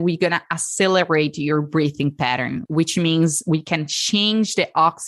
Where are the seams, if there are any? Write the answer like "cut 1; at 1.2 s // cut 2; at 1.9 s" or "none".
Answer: cut 1; at 2.6 s